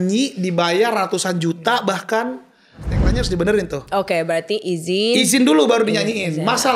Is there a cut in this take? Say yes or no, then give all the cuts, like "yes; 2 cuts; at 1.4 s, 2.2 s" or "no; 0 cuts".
yes; 1 cut; at 3.1 s